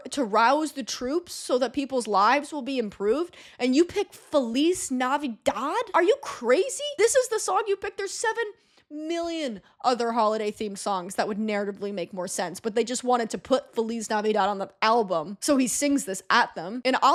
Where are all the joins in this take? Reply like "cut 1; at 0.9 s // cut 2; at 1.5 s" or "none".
none